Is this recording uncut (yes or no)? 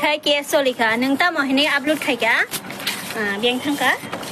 yes